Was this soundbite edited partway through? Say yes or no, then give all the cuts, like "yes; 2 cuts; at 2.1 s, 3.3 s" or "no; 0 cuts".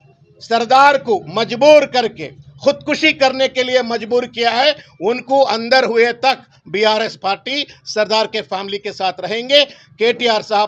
no; 0 cuts